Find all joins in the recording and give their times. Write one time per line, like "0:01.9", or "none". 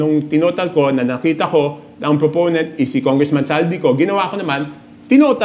none